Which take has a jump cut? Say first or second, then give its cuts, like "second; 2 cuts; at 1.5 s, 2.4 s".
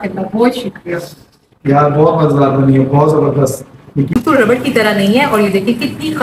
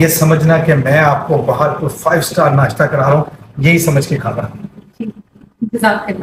first; 1 cut; at 4.6 s